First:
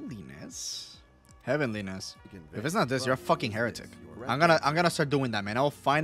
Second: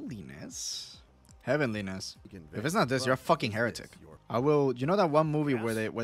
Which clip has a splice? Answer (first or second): first